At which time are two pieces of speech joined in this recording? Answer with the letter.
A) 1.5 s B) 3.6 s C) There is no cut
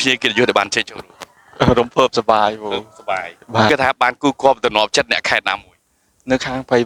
C